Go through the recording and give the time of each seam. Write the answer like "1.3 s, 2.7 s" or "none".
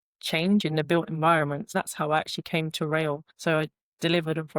1.7 s, 3.3 s